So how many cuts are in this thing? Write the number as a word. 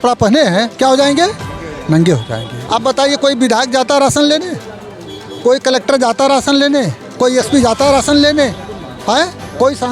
one